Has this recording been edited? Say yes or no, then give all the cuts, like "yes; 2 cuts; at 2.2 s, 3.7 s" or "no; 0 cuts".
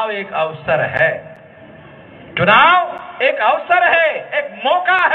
no; 0 cuts